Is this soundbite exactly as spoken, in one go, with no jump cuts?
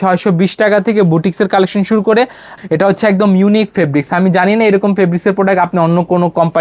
no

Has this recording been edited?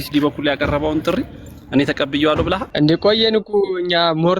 yes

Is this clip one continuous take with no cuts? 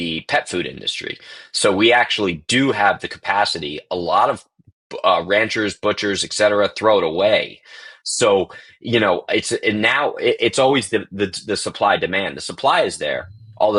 yes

